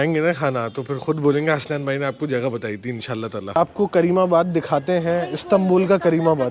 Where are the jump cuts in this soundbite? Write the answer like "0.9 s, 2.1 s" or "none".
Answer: 3.6 s